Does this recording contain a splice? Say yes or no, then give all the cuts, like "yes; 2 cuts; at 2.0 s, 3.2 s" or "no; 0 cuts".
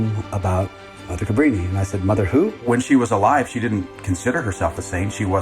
yes; 1 cut; at 2.6 s